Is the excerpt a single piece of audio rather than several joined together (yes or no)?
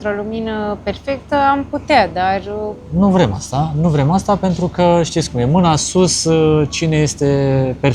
yes